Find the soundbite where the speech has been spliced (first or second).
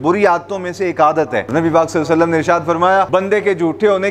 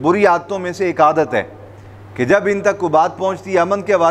first